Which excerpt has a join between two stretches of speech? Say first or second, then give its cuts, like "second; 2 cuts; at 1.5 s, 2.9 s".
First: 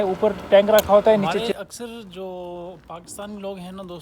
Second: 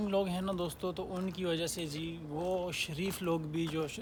first; 1 cut; at 1.4 s